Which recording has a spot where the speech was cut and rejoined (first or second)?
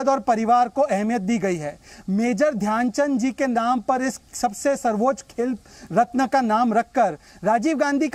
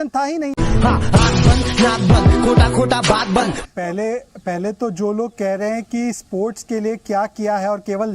second